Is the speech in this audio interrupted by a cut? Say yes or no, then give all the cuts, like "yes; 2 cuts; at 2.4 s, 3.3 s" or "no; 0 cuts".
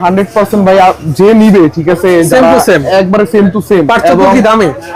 no; 0 cuts